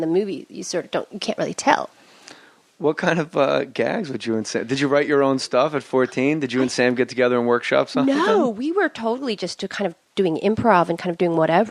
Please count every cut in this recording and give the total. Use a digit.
1